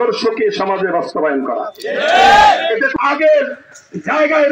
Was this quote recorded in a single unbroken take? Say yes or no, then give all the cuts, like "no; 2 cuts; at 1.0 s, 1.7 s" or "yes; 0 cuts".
no; 1 cut; at 2.9 s